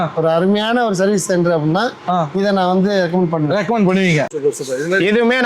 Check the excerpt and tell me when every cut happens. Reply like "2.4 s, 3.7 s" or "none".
4.3 s

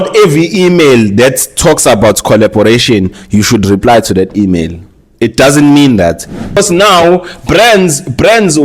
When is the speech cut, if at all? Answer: 6.6 s

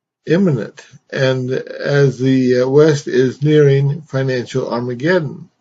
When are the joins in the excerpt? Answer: none

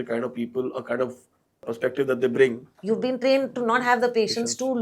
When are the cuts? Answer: 1.6 s, 2.7 s

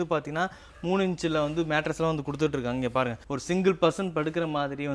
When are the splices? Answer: none

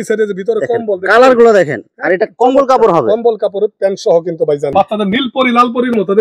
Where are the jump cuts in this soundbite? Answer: 4.7 s

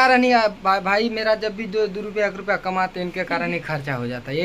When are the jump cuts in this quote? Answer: none

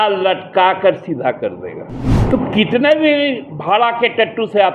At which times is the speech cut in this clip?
2.1 s

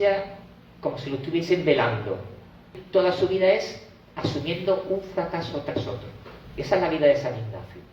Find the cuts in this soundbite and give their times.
2.8 s

